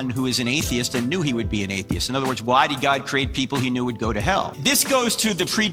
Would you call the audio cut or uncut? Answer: uncut